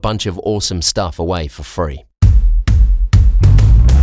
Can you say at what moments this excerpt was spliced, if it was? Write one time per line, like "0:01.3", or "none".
0:02.0

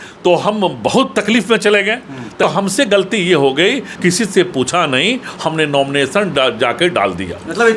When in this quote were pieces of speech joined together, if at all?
0:02.4
0:03.9

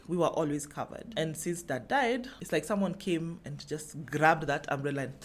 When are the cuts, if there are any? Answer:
0:02.3

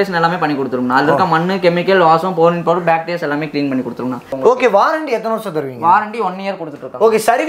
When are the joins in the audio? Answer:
0:04.3

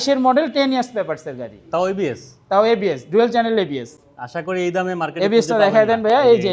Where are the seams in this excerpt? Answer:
none

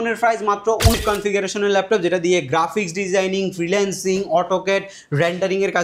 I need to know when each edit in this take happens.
0:00.9

